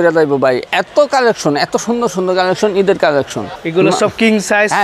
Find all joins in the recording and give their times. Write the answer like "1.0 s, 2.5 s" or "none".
none

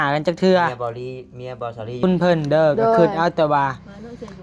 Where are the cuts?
2.0 s

